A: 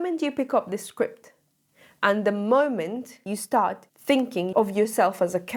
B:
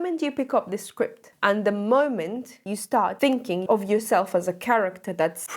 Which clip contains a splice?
B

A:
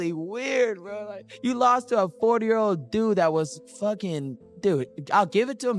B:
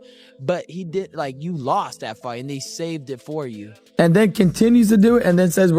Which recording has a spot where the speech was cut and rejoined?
B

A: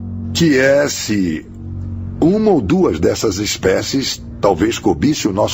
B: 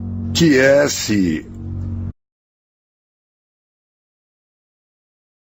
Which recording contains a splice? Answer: A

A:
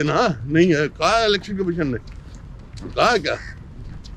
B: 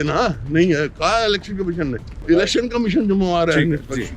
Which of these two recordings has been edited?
B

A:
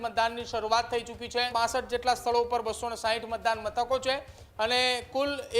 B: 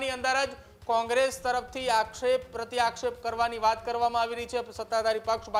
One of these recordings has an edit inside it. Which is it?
A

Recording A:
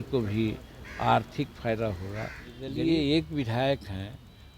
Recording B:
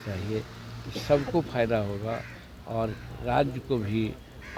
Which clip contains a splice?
A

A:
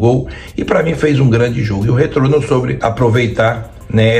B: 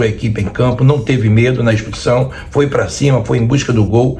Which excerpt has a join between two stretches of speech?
A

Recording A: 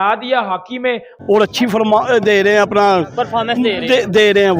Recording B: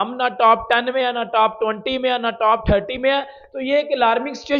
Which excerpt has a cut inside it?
A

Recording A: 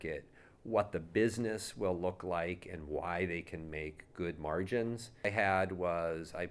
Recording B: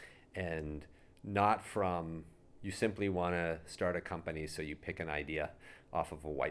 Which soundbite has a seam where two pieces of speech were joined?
A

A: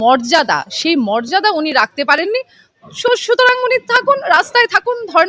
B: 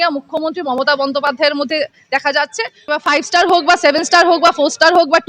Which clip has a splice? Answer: B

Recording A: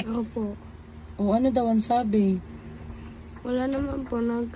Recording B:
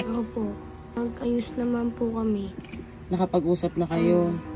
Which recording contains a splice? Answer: B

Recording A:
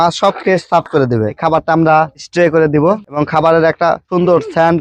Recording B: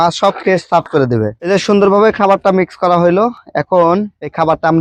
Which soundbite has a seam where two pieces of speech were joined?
A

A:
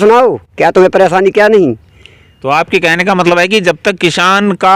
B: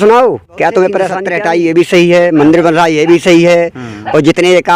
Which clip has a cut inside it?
B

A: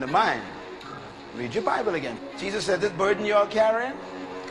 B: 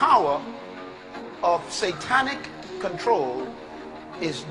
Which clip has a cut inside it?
A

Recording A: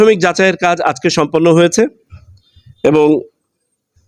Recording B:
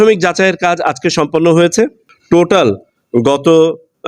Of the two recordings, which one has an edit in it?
B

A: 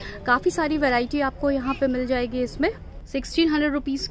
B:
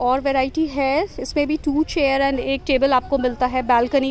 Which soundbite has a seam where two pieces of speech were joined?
A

